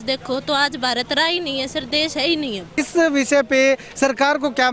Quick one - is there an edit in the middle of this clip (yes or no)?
no